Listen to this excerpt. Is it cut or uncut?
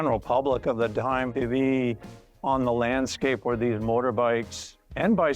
cut